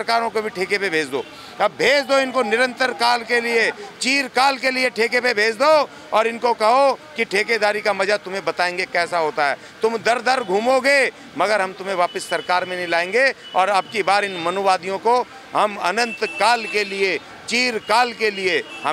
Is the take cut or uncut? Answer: uncut